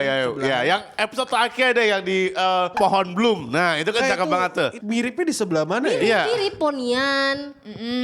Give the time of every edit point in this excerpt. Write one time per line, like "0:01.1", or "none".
0:02.7
0:04.8